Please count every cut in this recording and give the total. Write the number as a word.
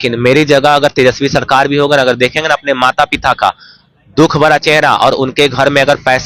zero